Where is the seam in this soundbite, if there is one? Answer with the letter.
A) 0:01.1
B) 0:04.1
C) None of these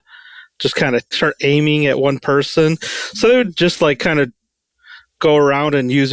A